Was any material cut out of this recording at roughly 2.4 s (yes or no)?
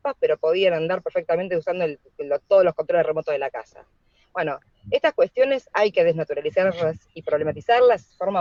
no